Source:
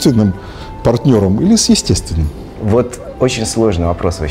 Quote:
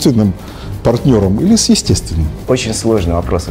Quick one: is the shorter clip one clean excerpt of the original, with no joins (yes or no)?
no